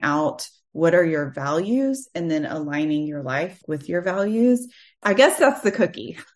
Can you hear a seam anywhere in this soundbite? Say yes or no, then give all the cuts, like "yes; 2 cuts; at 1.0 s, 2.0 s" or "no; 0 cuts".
yes; 2 cuts; at 3.6 s, 5.0 s